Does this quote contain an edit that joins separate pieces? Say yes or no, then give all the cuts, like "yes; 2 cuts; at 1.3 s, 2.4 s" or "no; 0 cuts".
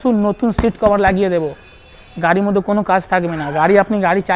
no; 0 cuts